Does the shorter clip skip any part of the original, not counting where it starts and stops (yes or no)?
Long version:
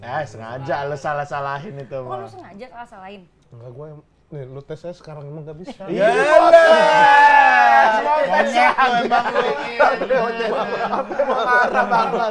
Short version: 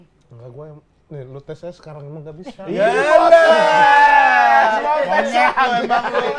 no